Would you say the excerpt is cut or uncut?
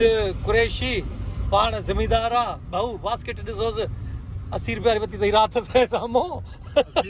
uncut